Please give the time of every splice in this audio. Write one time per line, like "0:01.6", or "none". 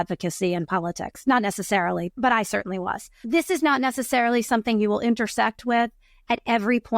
0:02.2
0:03.2